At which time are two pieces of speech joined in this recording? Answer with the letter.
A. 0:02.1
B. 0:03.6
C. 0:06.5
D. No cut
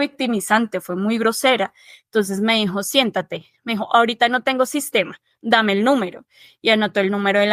D